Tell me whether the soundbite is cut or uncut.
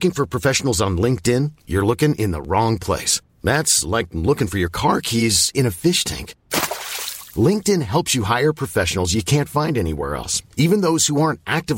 uncut